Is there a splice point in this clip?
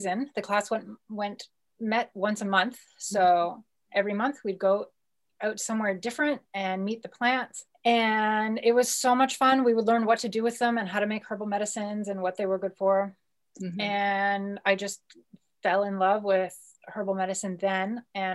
no; 0 cuts

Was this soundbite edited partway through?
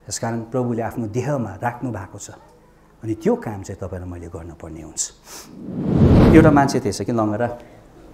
yes; 1 cut; at 5.9 s

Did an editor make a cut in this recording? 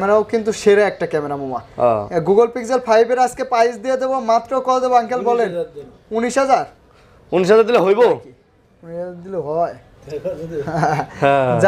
no; 0 cuts

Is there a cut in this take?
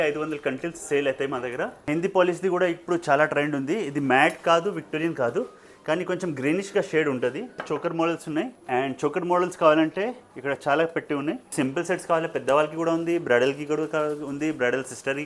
yes; 4 cuts; at 1.9 s, 7.6 s, 8.6 s, 11.5 s

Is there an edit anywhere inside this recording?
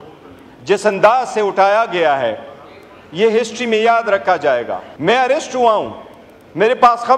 yes; 1 cut; at 4.8 s

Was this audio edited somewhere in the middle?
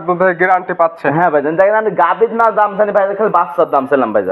no; 0 cuts

